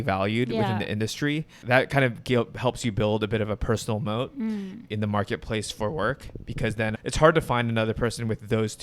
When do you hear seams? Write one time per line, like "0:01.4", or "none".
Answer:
0:01.5
0:07.0